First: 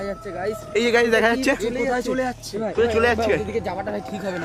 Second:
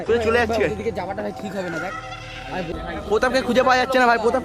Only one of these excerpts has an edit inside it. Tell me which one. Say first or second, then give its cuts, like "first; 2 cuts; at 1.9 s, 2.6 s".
second; 1 cut; at 2.7 s